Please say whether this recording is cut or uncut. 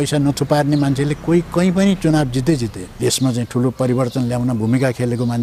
cut